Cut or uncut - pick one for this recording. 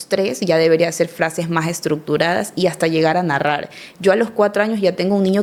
uncut